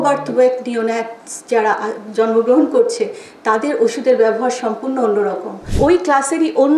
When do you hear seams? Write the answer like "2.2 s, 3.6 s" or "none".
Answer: 5.7 s